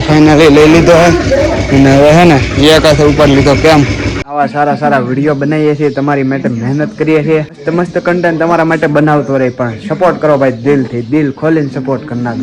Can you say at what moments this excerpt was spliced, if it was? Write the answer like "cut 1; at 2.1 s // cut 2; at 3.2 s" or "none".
cut 1; at 4.3 s // cut 2; at 7.6 s